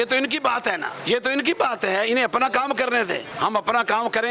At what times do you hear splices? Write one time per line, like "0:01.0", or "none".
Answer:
0:00.9
0:03.3